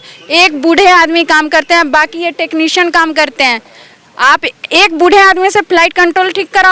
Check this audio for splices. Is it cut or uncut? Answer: uncut